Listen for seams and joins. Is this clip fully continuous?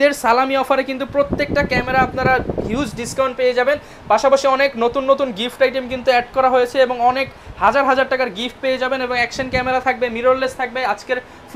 yes; 0 cuts

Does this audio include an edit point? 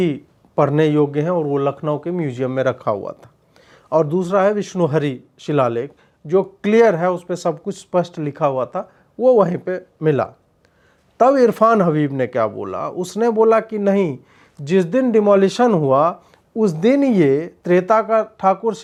no; 0 cuts

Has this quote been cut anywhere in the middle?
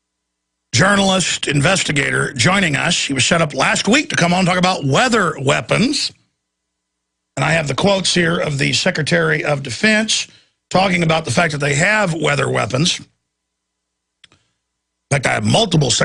no; 0 cuts

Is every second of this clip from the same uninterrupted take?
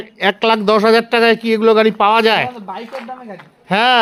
yes; 0 cuts

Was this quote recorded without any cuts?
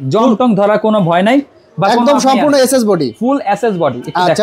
yes; 0 cuts

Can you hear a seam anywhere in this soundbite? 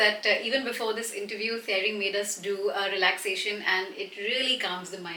no; 0 cuts

